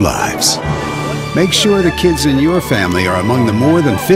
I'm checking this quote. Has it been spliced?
no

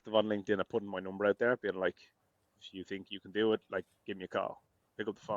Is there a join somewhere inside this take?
no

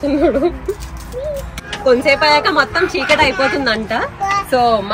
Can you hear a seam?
yes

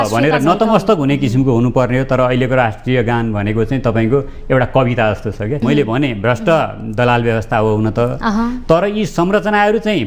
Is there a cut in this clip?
yes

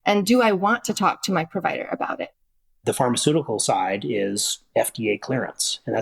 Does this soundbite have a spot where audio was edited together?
yes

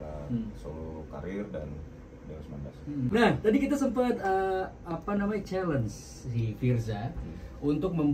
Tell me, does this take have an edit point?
yes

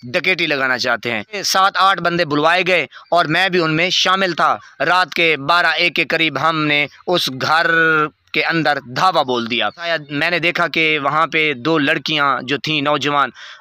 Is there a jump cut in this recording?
yes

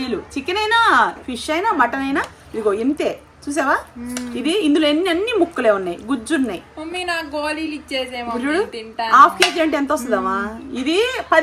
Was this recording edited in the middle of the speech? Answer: no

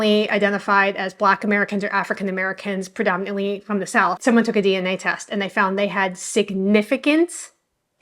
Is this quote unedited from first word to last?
no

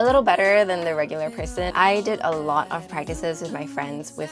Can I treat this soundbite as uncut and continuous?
no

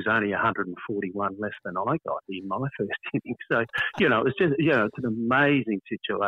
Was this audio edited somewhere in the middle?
no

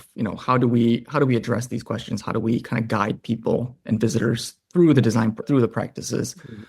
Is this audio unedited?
no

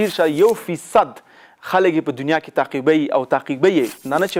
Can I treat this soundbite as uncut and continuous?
yes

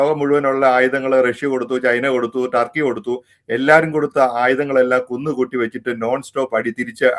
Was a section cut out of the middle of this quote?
no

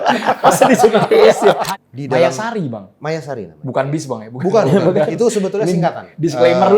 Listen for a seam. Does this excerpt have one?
yes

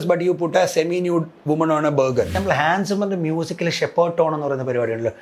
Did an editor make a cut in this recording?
yes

